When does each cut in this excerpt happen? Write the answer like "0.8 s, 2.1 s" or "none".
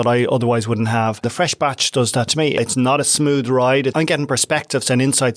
1.2 s, 2.6 s, 3.9 s